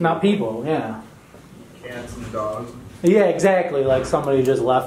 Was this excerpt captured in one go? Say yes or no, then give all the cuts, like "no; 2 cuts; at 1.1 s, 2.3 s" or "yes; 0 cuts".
yes; 0 cuts